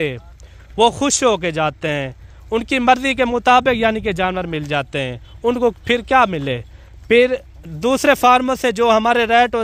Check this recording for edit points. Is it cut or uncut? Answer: uncut